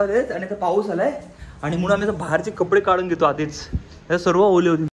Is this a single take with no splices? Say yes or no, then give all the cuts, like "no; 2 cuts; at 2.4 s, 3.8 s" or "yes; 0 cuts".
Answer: yes; 0 cuts